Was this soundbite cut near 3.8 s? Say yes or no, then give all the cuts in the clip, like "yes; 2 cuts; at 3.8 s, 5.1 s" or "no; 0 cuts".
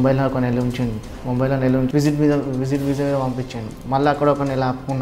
no; 1 cut; at 1.9 s